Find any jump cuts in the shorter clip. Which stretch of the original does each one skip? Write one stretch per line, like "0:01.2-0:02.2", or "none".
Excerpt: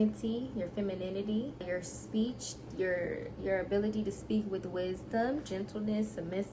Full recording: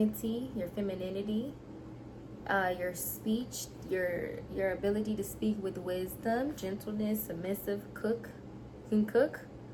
0:01.6-0:02.8